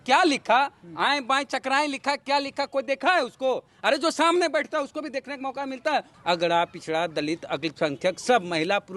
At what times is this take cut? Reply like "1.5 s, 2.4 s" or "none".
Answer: 6.1 s